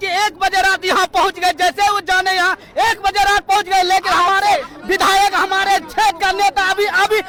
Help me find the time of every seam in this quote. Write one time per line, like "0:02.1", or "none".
none